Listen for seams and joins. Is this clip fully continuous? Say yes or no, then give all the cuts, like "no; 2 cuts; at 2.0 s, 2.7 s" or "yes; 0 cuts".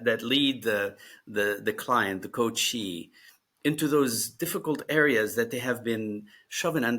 yes; 0 cuts